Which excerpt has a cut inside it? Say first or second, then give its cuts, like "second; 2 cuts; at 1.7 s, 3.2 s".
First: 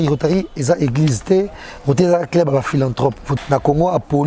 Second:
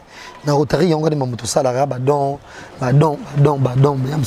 first; 1 cut; at 3.3 s